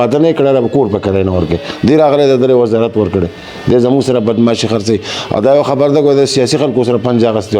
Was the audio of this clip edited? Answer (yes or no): no